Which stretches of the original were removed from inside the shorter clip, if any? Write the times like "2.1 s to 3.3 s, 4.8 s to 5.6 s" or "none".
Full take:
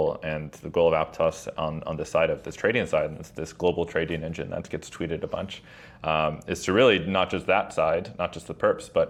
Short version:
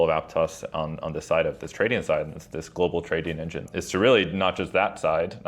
4.5 s to 6.4 s